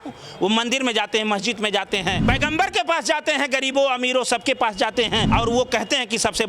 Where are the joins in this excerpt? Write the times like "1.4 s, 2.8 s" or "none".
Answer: 2.2 s, 5.2 s